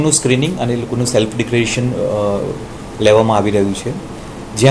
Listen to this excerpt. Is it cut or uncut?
uncut